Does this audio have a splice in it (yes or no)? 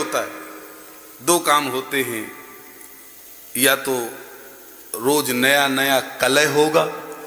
no